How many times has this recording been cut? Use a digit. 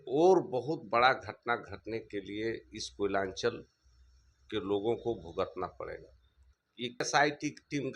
1